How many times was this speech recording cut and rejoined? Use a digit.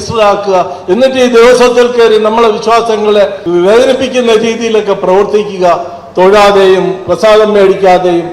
1